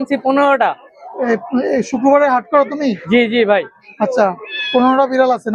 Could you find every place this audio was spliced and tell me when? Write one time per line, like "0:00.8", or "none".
none